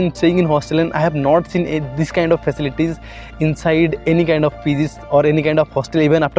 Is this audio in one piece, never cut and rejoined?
yes; 0 cuts

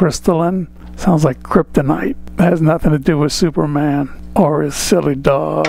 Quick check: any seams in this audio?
yes; 2 cuts; at 2.2 s, 4.2 s

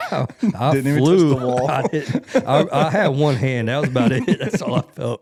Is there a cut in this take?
no; 0 cuts

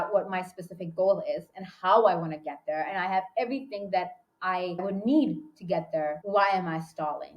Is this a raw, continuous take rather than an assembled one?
no; 2 cuts; at 4.8 s, 6.2 s

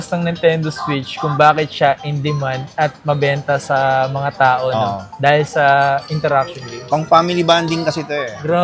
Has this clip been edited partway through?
no; 0 cuts

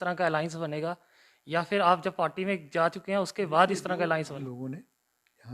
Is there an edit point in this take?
yes; 1 cut; at 4.4 s

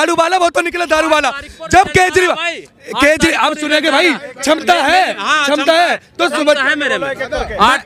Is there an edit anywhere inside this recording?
no; 0 cuts

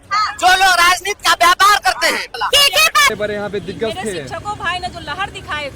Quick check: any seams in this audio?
yes; 1 cut; at 3.1 s

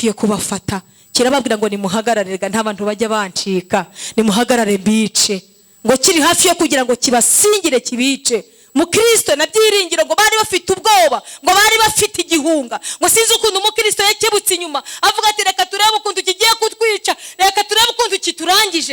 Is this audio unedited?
yes; 0 cuts

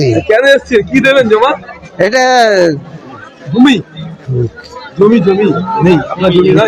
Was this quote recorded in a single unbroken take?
yes; 0 cuts

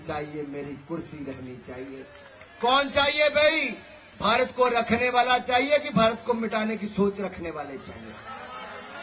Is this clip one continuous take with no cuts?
yes; 0 cuts

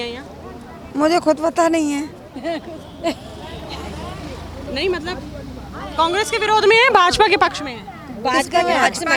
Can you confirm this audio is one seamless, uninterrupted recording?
yes; 0 cuts

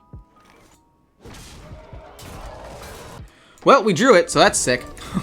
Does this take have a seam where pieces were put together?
yes; 1 cut; at 3.2 s

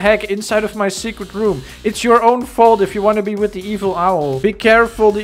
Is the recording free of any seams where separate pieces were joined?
yes; 0 cuts

